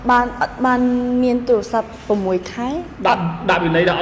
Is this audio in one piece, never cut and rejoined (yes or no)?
no